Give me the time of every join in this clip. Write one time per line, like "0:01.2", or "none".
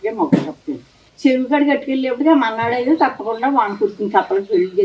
0:01.0